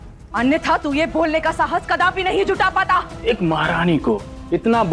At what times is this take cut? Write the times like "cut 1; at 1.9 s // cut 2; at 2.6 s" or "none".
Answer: cut 1; at 3.1 s